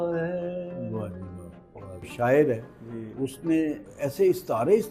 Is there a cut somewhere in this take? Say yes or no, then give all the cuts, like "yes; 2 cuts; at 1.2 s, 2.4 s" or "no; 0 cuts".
yes; 1 cut; at 2.1 s